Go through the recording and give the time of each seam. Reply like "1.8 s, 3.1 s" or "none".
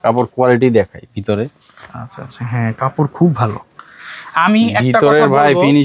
none